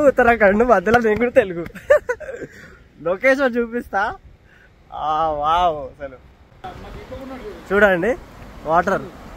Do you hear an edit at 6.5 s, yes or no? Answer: no